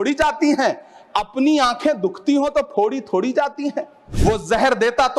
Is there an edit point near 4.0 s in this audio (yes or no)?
yes